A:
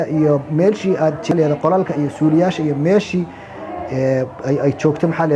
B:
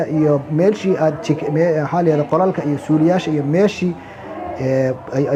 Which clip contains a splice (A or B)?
A